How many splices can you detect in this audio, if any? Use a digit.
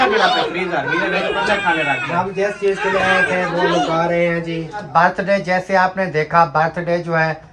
1